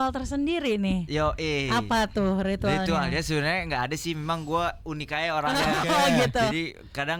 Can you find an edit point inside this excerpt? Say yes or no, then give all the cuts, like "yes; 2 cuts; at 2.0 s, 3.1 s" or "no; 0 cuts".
no; 0 cuts